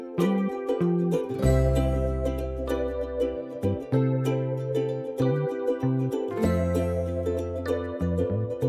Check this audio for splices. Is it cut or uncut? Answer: uncut